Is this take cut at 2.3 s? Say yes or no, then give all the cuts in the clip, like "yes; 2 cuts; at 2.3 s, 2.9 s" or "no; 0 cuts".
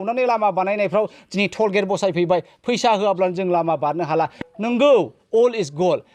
no; 1 cut; at 4.4 s